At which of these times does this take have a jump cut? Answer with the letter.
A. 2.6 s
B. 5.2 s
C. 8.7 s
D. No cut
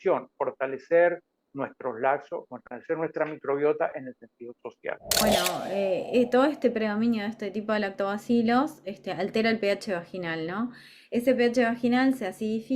B